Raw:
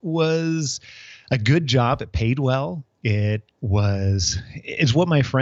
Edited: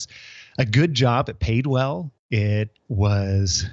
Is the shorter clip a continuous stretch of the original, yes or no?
yes